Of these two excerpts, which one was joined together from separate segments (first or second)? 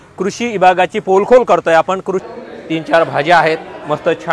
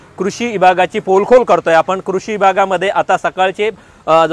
first